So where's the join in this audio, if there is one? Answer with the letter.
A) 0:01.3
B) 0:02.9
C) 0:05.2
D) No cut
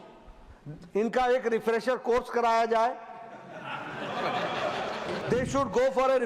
C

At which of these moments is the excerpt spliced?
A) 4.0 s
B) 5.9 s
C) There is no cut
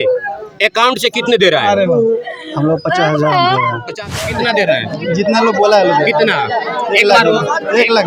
A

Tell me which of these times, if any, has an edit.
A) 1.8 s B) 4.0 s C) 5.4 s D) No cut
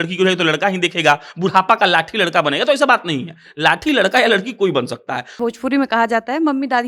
C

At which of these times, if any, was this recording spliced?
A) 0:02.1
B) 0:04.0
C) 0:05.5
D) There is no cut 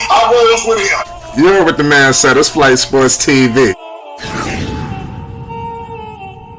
D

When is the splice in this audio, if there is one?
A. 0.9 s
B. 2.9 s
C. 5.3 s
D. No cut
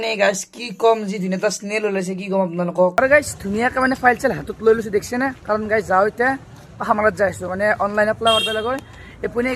B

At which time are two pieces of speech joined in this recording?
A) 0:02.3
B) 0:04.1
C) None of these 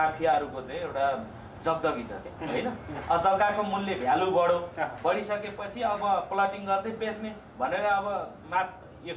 A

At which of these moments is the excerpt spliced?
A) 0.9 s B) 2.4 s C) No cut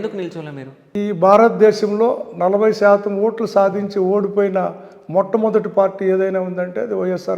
A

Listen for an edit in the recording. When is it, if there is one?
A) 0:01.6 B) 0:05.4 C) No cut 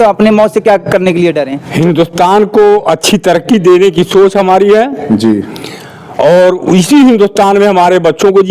A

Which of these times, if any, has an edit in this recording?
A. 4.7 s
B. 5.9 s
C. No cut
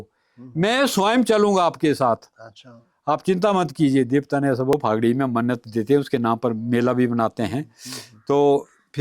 A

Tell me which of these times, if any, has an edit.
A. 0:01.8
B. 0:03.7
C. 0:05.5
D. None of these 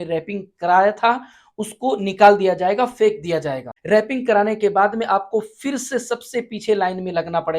B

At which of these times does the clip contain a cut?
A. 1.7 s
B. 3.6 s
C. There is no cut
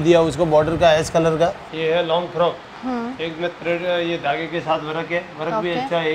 A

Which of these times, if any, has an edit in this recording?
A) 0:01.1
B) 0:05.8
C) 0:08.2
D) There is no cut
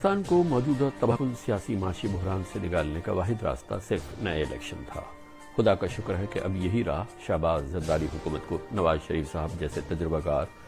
A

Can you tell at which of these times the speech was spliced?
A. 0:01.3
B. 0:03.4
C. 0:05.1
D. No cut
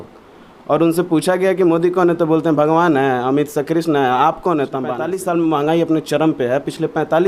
C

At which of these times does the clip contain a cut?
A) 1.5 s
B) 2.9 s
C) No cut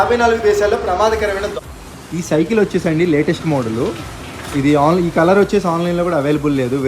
A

